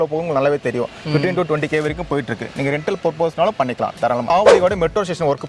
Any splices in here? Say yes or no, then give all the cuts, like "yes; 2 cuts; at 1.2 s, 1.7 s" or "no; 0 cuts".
yes; 1 cut; at 4.3 s